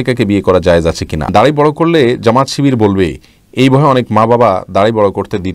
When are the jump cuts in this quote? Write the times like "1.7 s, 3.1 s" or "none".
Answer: 1.3 s